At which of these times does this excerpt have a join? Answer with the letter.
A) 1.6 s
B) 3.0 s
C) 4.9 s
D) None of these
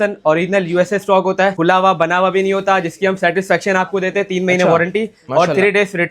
A